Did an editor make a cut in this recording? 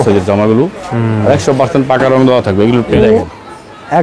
yes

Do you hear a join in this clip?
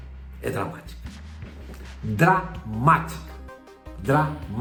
no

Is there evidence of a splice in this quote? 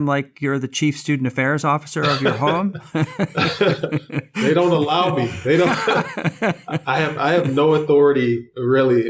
no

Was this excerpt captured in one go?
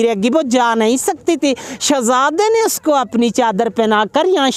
yes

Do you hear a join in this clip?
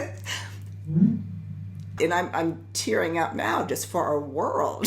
yes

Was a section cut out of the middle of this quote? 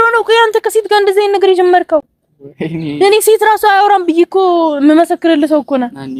no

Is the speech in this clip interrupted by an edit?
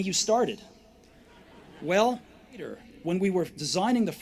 yes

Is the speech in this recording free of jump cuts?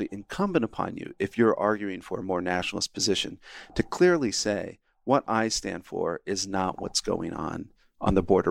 yes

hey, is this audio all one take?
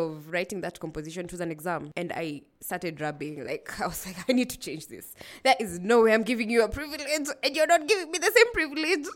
yes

